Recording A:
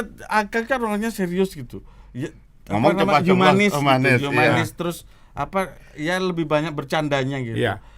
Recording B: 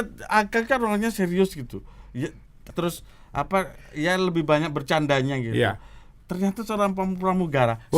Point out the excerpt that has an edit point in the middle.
B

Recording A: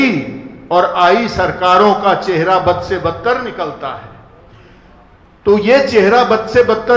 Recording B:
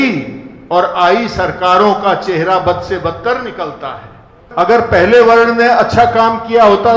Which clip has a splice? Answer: B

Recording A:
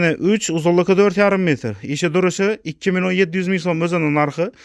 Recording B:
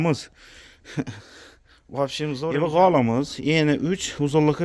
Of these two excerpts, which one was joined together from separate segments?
B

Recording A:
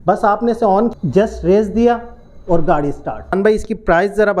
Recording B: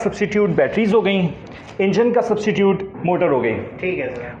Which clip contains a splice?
A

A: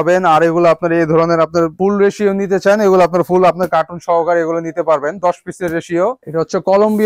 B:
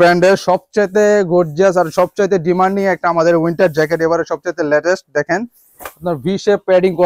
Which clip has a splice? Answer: A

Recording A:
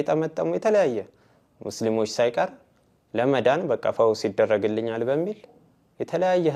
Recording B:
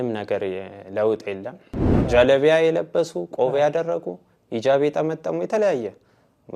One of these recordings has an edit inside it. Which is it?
B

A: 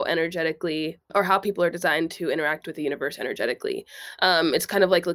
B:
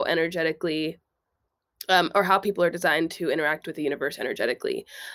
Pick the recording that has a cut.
A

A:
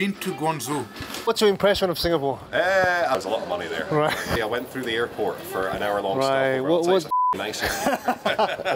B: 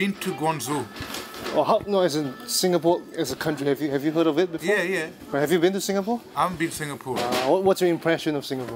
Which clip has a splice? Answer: A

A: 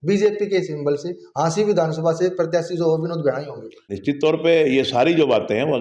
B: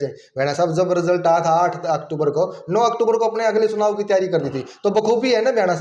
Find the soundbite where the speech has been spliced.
A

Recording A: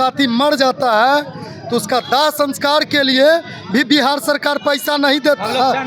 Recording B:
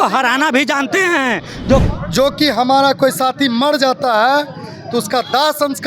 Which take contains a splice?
B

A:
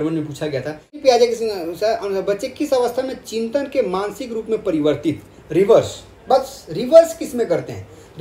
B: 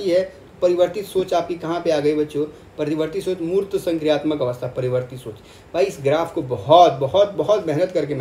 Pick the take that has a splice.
A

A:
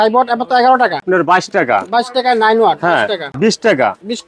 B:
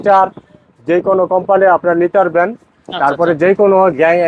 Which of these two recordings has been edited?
A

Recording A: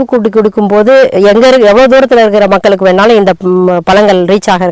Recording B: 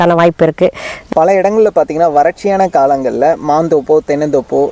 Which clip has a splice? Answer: B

